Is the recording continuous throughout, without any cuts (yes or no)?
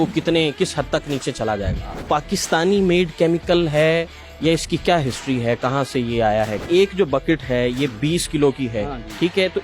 no